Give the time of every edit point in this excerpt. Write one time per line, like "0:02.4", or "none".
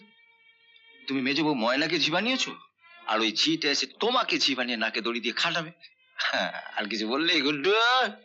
none